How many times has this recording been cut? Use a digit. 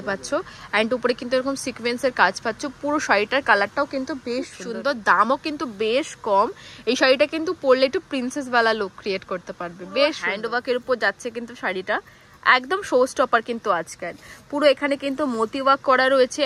2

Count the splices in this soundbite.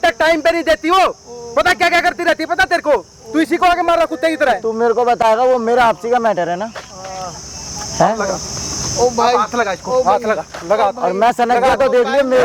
0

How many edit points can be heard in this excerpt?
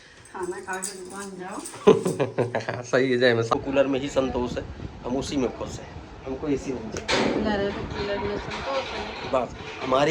1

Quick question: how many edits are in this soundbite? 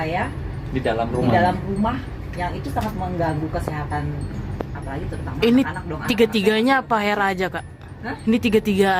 0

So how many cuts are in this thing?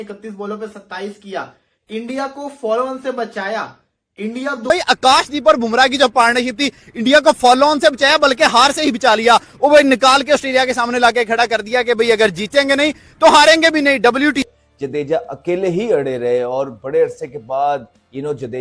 2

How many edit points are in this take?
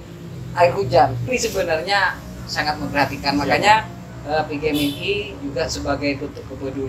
1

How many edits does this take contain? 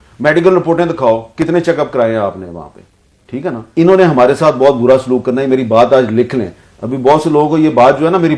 1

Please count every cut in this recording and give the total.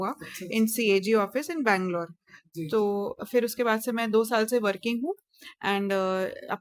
0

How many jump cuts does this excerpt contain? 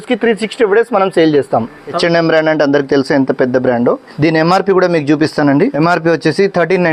3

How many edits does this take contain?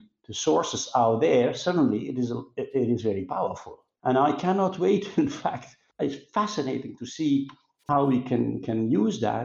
1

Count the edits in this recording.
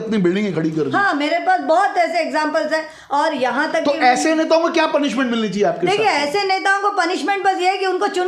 0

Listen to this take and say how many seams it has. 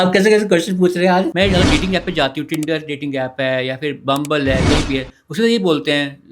1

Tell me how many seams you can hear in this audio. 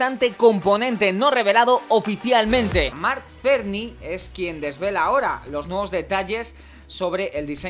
1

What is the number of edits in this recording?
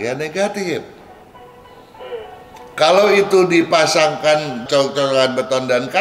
0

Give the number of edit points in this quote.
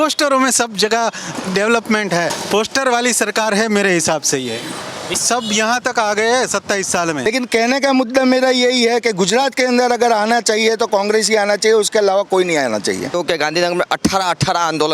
4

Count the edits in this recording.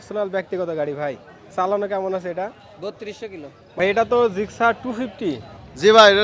1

